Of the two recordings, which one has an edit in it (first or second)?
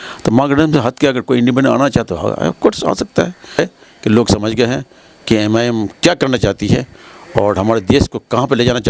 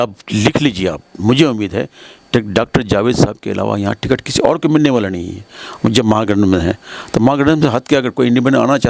first